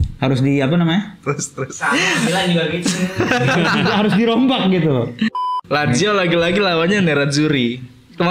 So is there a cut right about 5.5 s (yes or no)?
yes